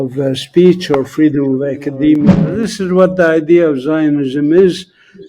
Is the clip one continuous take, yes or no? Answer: no